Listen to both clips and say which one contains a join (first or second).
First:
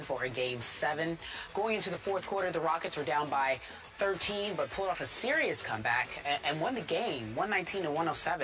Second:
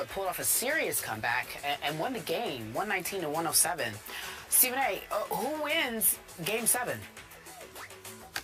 second